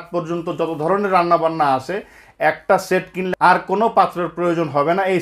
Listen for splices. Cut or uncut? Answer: cut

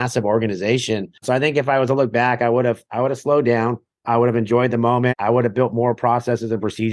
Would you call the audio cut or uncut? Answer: cut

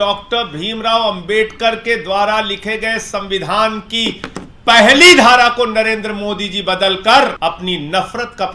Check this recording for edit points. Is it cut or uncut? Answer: cut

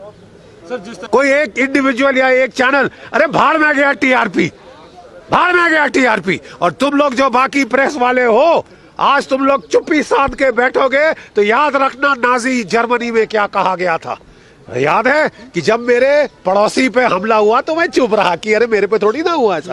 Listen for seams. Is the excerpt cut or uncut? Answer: cut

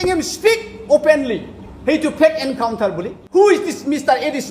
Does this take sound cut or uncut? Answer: cut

